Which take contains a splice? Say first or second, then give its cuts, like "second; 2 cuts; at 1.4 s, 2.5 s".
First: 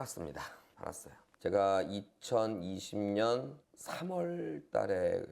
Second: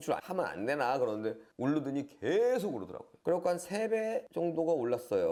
first; 1 cut; at 1.3 s